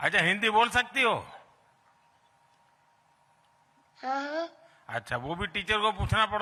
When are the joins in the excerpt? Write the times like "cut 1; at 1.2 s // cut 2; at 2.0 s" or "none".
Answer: none